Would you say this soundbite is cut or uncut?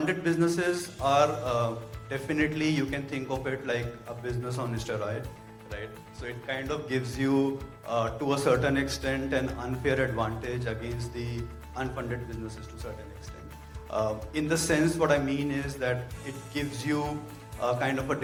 uncut